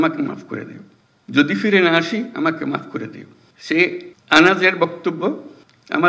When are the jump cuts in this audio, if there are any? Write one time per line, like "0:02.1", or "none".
0:04.1